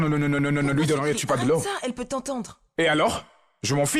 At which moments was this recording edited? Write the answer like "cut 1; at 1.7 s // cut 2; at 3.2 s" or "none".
none